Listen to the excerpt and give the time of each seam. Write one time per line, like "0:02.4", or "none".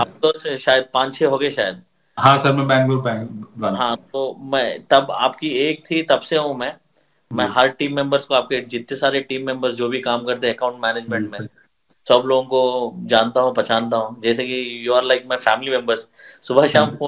none